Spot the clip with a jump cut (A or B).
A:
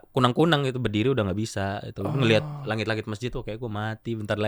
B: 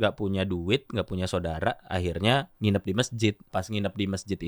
B